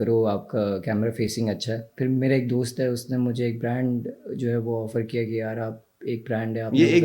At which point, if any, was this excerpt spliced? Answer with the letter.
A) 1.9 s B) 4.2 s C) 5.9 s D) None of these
A